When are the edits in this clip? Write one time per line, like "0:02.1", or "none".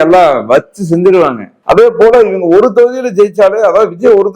0:01.5